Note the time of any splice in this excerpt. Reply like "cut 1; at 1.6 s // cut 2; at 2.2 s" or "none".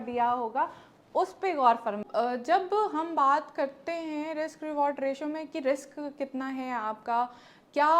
cut 1; at 2.0 s